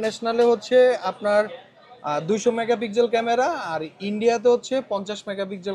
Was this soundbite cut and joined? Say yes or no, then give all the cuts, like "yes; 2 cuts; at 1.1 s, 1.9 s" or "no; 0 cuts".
no; 0 cuts